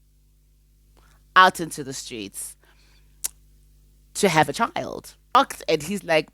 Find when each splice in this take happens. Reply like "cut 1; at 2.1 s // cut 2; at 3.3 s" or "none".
cut 1; at 5.3 s